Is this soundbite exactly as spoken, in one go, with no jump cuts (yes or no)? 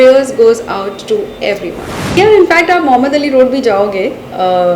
no